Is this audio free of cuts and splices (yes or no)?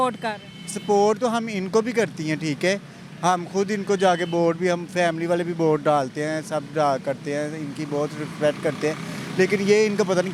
yes